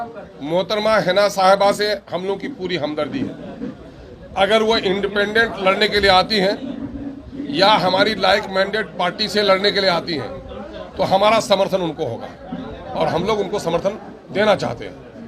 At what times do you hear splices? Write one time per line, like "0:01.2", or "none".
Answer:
none